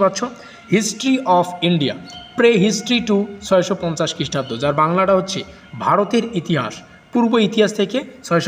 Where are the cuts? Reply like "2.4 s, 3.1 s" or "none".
none